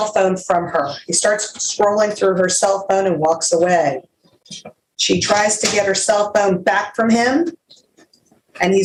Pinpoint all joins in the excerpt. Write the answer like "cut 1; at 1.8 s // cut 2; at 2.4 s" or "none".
none